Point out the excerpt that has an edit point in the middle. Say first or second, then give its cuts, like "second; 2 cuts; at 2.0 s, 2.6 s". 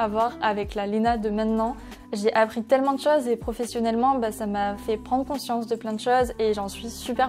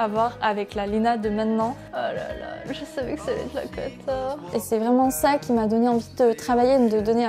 second; 2 cuts; at 1.9 s, 4.5 s